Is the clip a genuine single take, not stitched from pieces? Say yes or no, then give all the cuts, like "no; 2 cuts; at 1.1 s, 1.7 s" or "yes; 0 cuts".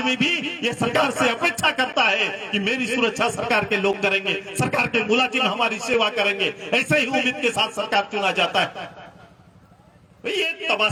yes; 0 cuts